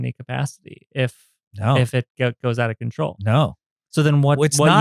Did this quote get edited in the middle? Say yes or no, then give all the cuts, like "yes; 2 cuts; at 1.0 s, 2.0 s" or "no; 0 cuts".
no; 0 cuts